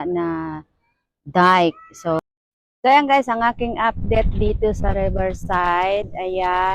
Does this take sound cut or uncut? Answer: cut